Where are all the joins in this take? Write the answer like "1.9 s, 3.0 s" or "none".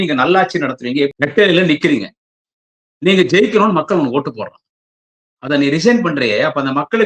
1.1 s